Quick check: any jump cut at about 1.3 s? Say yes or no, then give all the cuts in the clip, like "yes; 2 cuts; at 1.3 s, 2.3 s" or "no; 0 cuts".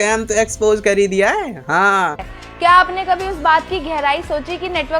no; 0 cuts